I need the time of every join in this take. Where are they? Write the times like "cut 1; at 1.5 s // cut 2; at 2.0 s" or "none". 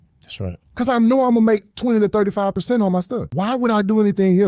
cut 1; at 3.3 s